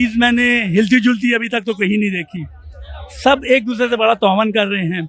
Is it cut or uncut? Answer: uncut